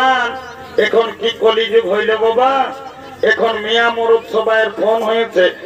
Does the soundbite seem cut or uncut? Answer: uncut